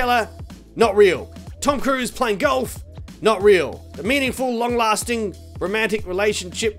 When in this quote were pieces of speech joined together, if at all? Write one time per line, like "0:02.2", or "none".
0:03.9